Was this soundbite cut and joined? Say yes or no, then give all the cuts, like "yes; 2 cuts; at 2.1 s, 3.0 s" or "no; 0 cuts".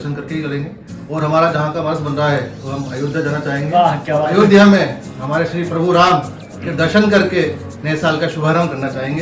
no; 0 cuts